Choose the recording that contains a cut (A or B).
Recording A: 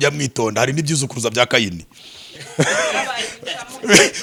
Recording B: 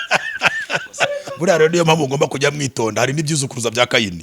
B